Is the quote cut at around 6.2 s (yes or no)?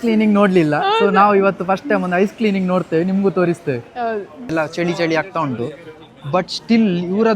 no